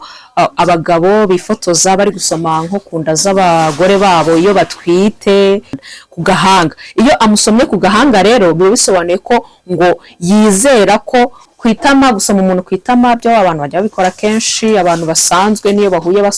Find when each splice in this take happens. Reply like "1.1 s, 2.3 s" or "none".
5.8 s, 11.4 s